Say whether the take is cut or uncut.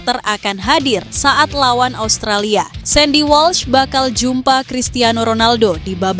cut